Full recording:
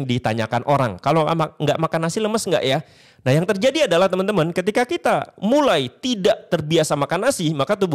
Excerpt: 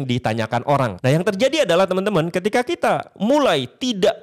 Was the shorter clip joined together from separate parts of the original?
yes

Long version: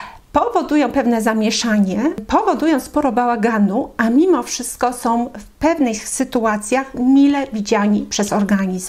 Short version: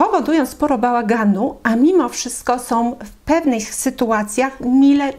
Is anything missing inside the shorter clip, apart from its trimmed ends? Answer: no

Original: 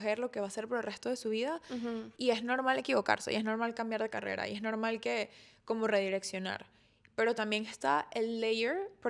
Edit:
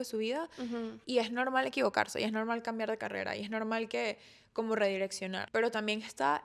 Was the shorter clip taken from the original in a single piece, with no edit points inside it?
no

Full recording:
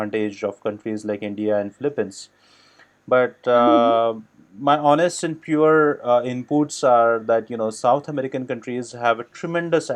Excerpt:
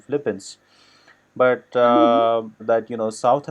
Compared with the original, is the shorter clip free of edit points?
no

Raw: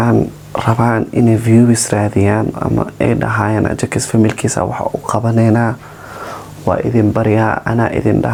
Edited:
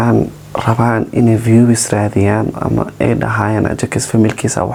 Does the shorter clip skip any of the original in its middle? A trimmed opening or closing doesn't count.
no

